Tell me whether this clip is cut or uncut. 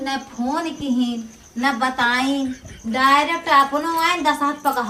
uncut